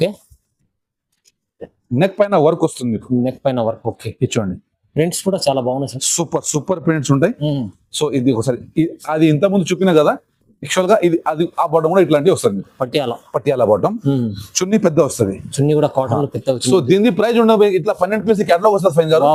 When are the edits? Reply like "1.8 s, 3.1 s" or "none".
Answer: none